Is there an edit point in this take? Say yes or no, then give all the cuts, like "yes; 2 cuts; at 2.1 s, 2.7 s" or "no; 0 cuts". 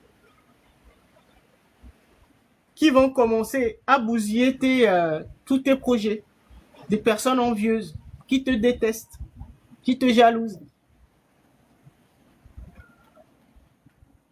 no; 0 cuts